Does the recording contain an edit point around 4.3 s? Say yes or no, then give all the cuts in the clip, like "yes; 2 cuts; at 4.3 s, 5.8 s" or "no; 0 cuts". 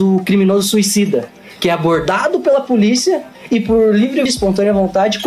yes; 1 cut; at 4.3 s